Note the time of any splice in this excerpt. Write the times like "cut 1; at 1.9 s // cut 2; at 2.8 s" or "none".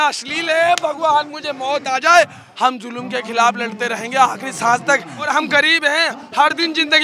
cut 1; at 2.4 s // cut 2; at 5.3 s